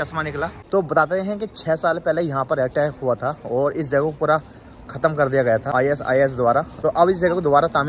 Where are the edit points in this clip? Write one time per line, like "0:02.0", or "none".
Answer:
0:00.9
0:05.7
0:06.7